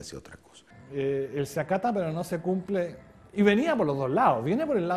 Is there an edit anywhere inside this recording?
no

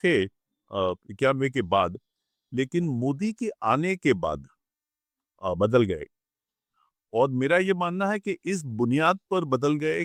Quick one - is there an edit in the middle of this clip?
no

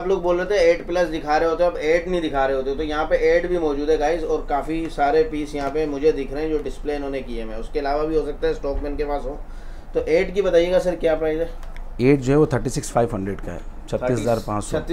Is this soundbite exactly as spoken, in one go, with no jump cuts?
yes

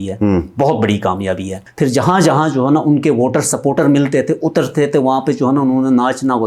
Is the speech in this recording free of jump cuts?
no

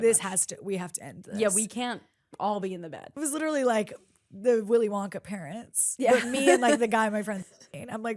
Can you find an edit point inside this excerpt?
yes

